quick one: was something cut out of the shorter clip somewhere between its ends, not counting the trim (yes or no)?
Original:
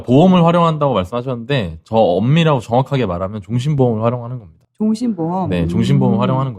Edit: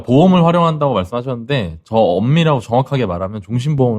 no